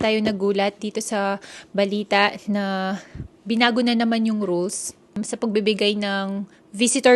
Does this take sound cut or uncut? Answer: cut